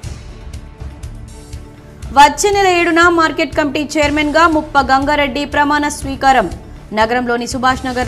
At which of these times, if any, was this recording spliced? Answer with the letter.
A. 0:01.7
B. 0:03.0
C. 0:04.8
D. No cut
A